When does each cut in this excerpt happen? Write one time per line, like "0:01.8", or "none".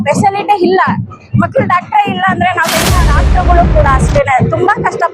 0:03.1